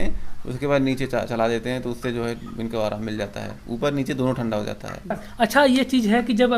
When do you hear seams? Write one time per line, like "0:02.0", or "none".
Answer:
0:05.2